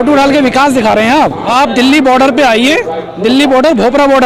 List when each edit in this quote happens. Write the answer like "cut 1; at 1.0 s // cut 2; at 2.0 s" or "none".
cut 1; at 1.4 s